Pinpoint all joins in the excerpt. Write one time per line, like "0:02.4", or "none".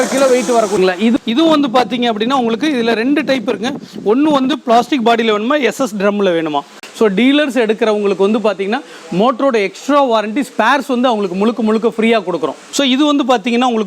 0:01.2
0:06.8
0:12.6